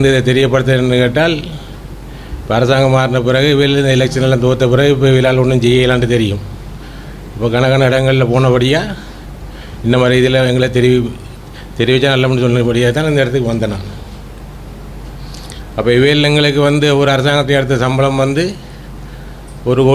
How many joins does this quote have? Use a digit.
0